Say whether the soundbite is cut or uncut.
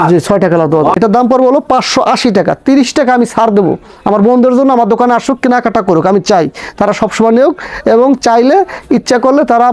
cut